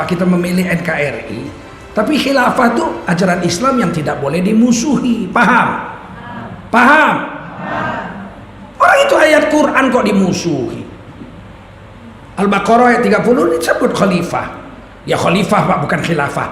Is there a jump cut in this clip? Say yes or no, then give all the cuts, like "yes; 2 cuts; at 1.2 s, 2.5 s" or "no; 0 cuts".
no; 0 cuts